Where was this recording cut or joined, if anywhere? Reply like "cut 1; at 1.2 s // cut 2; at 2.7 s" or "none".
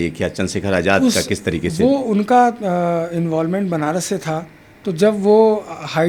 none